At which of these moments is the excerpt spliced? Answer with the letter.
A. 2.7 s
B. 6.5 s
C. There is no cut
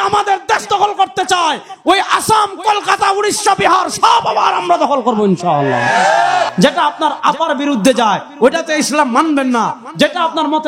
B